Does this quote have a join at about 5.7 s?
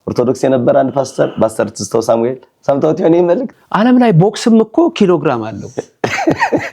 no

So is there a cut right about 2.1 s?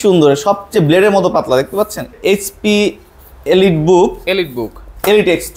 yes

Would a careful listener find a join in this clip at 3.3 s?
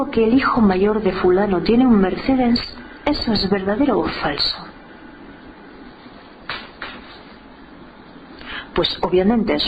no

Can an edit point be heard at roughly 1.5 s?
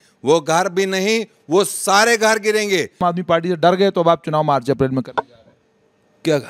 no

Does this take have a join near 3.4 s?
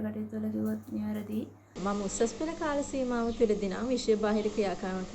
no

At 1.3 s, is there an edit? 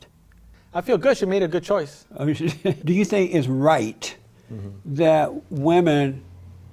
no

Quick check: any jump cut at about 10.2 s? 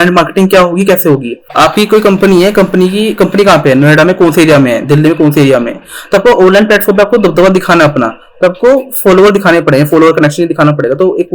no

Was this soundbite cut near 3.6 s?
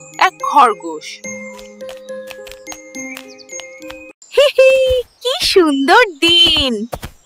no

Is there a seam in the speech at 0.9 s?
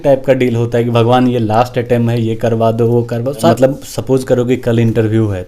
no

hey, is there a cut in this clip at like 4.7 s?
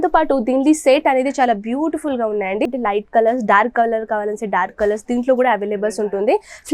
no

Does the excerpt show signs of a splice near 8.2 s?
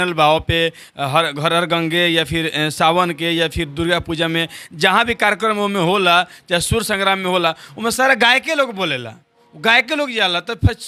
no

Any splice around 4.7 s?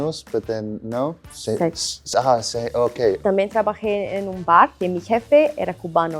no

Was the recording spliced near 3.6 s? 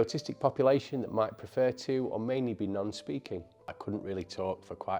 yes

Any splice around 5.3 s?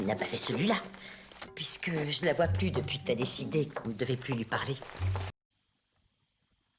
no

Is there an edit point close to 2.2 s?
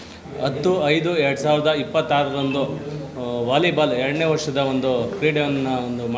no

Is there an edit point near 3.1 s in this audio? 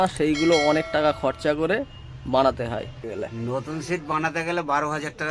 yes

